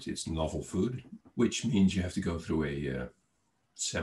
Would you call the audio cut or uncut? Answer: cut